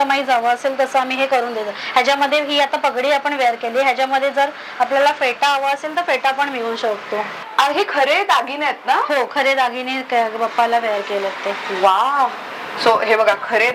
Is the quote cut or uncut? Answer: cut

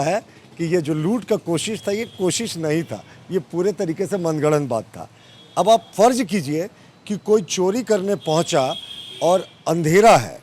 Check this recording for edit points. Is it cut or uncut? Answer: uncut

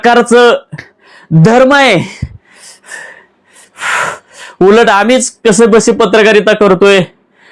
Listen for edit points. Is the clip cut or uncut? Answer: cut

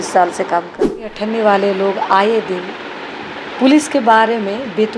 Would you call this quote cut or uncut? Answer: cut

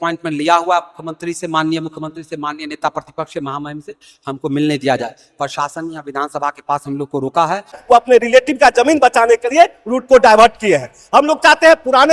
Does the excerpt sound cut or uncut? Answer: cut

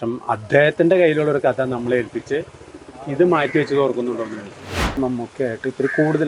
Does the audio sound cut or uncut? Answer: cut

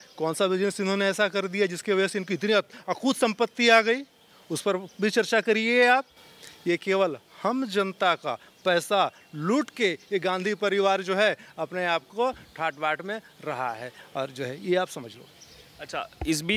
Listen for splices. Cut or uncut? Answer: uncut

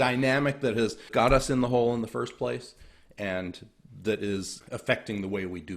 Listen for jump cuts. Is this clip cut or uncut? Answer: cut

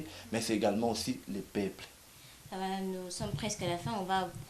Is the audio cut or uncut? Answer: uncut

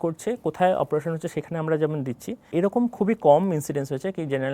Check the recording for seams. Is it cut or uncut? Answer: cut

